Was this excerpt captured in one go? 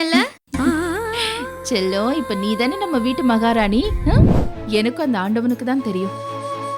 no; 1 cut; at 4.3 s

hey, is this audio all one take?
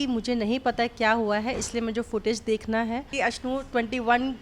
no; 1 cut; at 3.1 s

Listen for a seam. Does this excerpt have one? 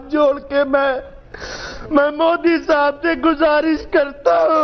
no; 0 cuts

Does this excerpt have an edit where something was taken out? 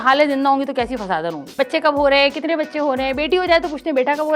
yes; 1 cut; at 1.4 s

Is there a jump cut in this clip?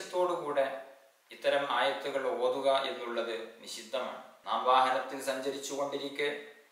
yes; 1 cut; at 4.3 s

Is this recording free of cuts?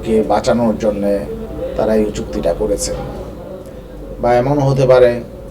no; 1 cut; at 1.4 s

